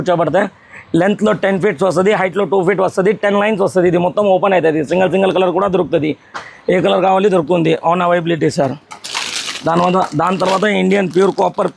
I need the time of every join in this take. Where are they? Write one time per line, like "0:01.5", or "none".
none